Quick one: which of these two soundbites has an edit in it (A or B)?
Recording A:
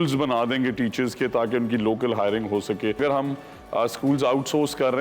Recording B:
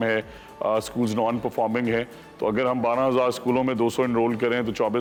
A